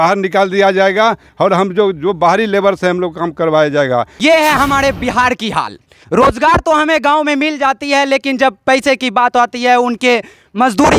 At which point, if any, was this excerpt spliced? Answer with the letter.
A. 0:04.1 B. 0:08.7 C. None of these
A